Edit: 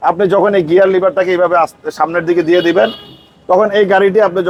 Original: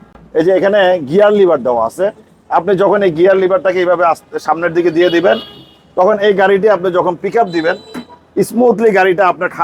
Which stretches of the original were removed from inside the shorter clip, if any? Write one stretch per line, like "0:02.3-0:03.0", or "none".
none